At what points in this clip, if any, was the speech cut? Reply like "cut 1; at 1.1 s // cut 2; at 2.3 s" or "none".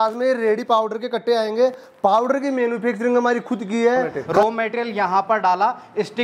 cut 1; at 4.2 s